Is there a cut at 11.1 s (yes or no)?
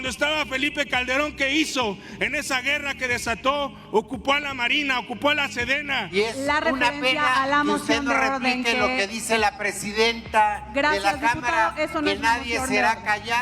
no